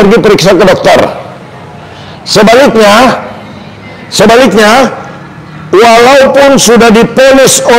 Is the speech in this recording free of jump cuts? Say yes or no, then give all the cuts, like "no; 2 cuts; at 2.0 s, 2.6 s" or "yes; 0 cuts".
yes; 0 cuts